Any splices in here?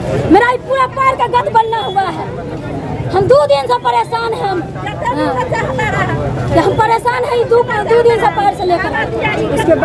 no; 0 cuts

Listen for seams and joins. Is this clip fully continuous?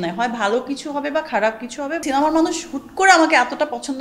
no; 1 cut; at 2.0 s

